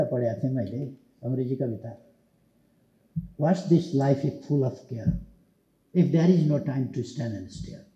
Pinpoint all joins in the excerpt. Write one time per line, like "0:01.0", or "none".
none